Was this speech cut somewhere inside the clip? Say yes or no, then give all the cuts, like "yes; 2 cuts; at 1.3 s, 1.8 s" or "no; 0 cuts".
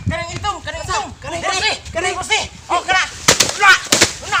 no; 0 cuts